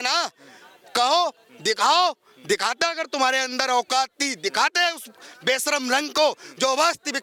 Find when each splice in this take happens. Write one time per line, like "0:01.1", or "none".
none